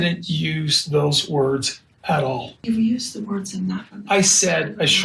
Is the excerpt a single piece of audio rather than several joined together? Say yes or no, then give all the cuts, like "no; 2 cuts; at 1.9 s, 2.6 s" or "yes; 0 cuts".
no; 1 cut; at 2.7 s